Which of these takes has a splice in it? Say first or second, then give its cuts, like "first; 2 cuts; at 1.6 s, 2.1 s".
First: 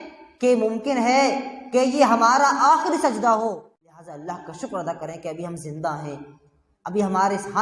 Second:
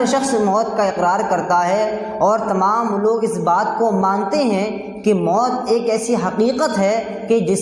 first; 1 cut; at 3.7 s